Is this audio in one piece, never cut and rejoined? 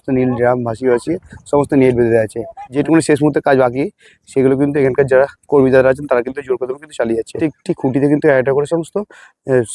no; 2 cuts; at 2.7 s, 7.3 s

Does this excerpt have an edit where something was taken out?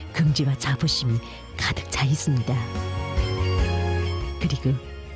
no; 0 cuts

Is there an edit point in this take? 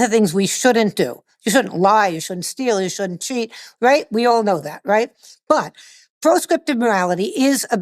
yes; 1 cut; at 5.2 s

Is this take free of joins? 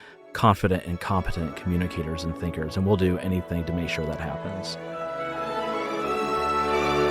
no; 1 cut; at 4.3 s

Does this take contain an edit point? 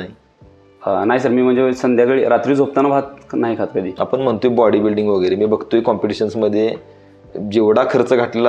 yes; 1 cut; at 3.9 s

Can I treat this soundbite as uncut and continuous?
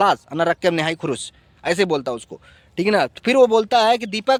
yes; 0 cuts

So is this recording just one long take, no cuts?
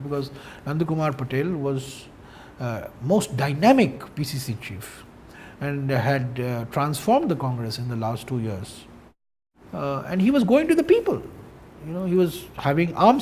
no; 1 cut; at 11.2 s

